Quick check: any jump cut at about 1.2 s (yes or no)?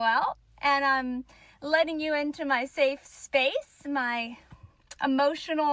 yes